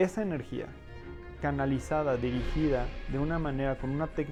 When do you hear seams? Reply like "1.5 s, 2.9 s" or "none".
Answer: none